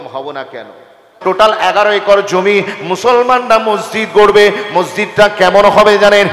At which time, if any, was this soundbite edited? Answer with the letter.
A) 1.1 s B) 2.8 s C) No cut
A